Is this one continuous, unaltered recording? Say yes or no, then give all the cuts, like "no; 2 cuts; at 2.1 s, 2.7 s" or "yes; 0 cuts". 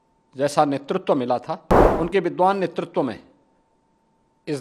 no; 1 cut; at 1.8 s